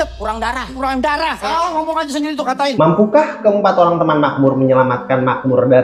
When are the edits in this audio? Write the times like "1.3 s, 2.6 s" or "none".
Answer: 2.7 s